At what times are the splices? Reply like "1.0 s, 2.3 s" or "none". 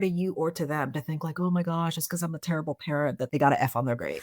3.2 s